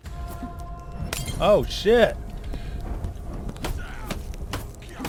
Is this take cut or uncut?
uncut